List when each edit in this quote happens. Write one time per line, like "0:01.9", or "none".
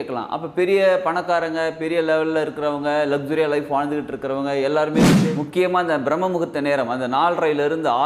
0:05.2